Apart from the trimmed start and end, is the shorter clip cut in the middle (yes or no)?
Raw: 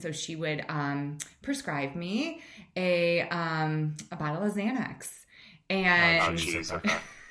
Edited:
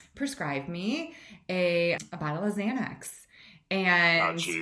yes